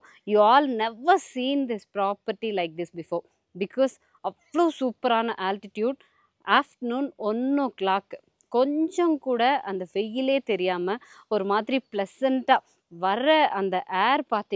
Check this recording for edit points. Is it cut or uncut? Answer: uncut